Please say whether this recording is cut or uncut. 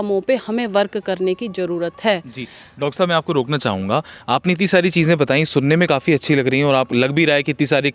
uncut